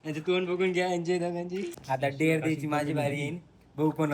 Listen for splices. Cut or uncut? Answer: cut